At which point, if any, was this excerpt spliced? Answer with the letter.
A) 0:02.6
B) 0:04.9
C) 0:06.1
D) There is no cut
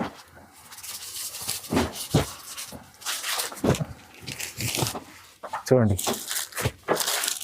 B